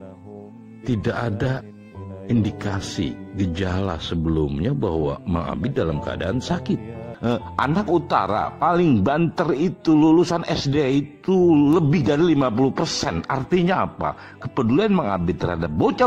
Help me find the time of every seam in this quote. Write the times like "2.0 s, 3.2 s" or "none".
7.0 s